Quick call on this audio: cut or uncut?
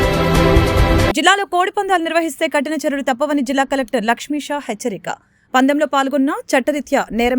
cut